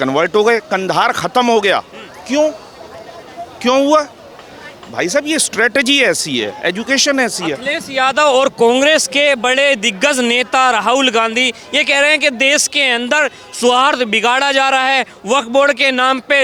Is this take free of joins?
yes; 0 cuts

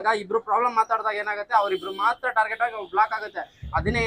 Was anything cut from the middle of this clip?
no; 0 cuts

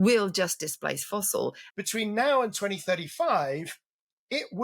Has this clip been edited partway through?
yes; 1 cut; at 1.6 s

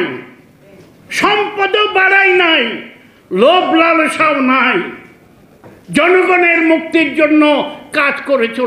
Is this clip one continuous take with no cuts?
yes; 0 cuts

